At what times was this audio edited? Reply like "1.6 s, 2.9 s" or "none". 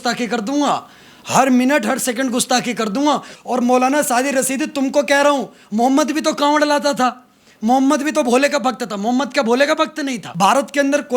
3.3 s, 10.2 s